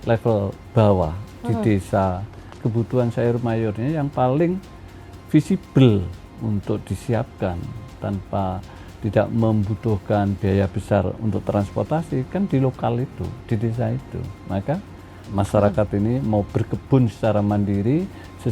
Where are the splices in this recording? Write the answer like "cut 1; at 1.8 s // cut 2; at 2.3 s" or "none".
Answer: cut 1; at 2.5 s // cut 2; at 15.2 s